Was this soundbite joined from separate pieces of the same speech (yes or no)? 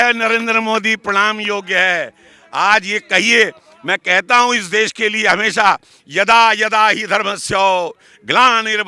no